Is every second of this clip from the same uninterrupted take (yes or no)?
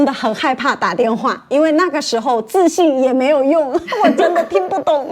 yes